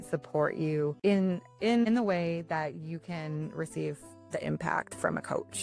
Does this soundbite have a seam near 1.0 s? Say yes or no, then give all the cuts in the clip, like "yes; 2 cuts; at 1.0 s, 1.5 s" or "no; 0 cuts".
yes; 1 cut; at 1.0 s